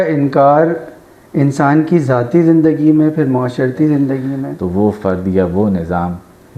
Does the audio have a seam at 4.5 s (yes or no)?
yes